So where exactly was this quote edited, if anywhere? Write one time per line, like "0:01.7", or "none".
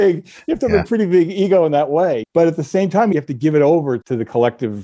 0:02.2
0:03.1
0:04.0